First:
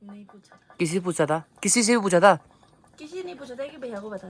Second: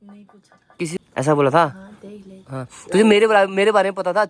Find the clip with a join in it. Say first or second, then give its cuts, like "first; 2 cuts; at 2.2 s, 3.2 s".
second; 1 cut; at 1.0 s